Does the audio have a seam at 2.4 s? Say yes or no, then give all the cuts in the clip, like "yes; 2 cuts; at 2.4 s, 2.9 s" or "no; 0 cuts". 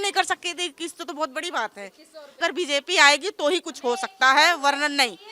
yes; 1 cut; at 2.4 s